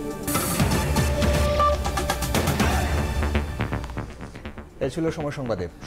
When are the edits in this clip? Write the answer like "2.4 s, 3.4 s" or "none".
none